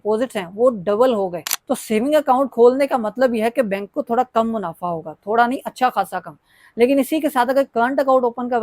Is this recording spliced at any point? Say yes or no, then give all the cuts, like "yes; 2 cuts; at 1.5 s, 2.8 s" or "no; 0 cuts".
yes; 1 cut; at 1.4 s